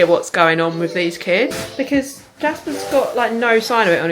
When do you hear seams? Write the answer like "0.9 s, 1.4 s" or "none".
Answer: 1.6 s